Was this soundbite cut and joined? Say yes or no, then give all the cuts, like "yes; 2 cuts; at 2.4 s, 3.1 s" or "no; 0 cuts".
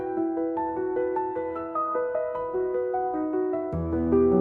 no; 0 cuts